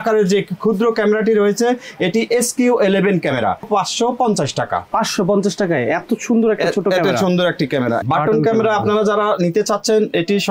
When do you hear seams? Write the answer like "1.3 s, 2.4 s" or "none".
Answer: 3.7 s, 8.0 s